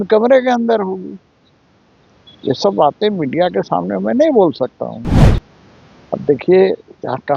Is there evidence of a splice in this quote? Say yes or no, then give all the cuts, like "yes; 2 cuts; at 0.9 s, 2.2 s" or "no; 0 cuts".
yes; 1 cut; at 5.1 s